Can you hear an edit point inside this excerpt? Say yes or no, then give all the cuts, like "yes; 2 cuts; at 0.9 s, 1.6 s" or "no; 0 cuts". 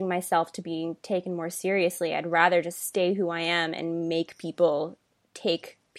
no; 0 cuts